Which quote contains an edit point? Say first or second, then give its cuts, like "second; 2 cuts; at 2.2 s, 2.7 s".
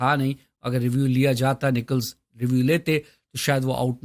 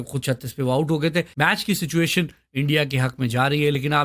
second; 1 cut; at 1.3 s